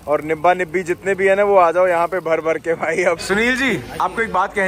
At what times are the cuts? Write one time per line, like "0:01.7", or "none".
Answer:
0:03.2